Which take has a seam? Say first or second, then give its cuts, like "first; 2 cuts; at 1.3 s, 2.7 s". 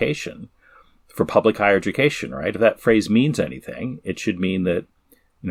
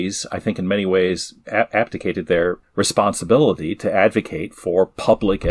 second; 2 cuts; at 1.4 s, 2.6 s